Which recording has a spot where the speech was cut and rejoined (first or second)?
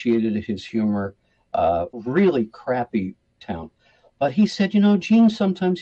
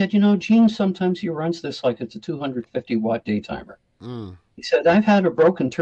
first